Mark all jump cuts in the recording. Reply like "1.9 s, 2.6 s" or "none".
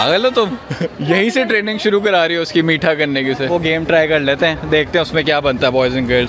0.9 s, 3.5 s